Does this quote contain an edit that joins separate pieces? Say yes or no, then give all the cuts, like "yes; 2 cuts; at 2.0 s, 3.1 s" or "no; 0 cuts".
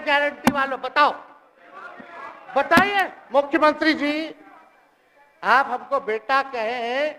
yes; 1 cut; at 3.2 s